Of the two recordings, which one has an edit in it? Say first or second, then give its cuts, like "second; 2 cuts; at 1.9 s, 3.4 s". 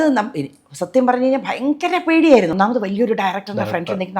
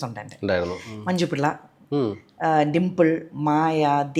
first; 1 cut; at 2.5 s